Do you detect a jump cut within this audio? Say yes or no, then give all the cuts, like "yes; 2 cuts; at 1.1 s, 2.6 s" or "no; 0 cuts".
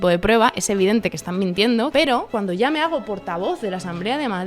yes; 1 cut; at 2.1 s